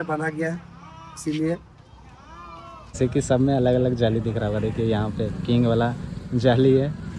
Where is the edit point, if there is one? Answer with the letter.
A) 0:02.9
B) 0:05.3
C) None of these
A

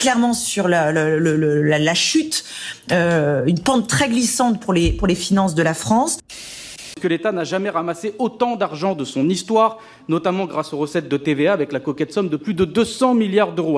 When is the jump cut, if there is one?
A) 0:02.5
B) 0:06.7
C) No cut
B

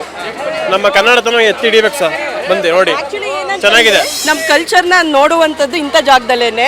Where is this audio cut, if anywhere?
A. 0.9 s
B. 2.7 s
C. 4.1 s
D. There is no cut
C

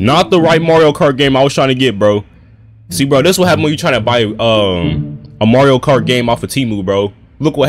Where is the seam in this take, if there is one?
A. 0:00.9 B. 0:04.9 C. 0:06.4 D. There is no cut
D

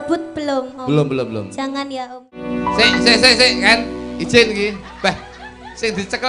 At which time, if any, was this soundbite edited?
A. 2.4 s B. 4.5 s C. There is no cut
A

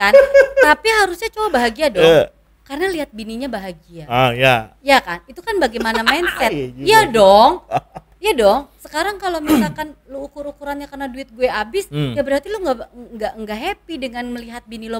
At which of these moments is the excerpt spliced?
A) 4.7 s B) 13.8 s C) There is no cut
C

